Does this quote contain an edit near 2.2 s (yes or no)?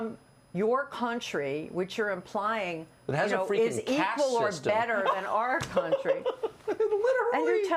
no